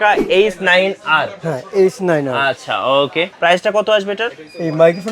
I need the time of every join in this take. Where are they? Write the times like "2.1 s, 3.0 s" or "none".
3.3 s